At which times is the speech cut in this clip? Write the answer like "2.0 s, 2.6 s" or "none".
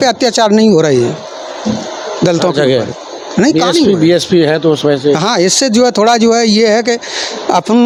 none